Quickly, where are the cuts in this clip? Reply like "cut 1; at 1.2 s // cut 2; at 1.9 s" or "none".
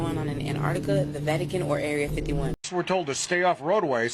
cut 1; at 2.6 s